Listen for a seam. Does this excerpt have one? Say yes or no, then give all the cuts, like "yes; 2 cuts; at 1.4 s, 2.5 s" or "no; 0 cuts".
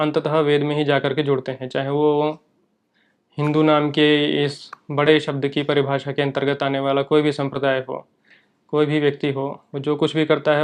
no; 0 cuts